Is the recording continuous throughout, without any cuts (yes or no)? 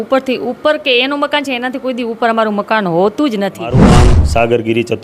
no